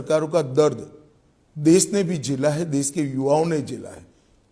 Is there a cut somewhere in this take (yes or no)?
no